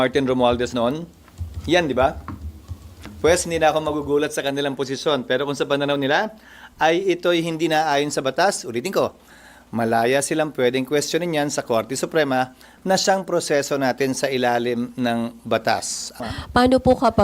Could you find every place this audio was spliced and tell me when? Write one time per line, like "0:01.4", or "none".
0:16.2

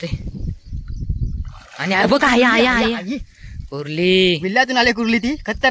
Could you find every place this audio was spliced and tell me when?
none

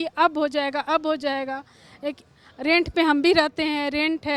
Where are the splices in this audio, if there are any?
none

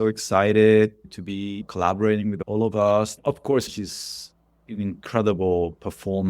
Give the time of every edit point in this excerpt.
0:01.6
0:02.4
0:03.1

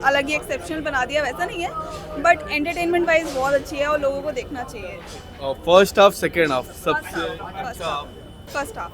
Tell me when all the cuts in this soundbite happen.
none

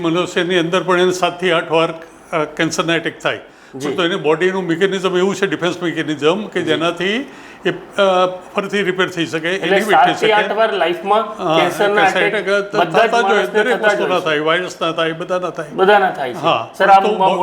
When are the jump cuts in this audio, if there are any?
none

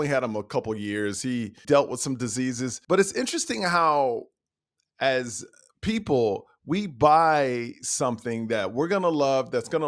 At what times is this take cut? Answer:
0:01.6
0:02.7

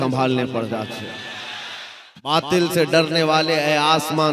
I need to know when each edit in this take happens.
0:02.3

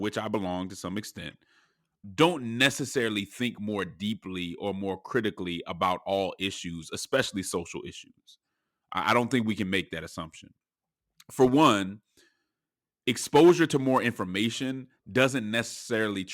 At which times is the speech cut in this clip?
0:02.0

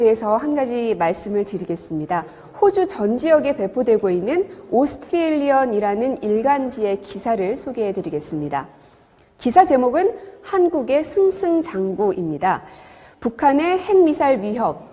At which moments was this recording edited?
0:03.6

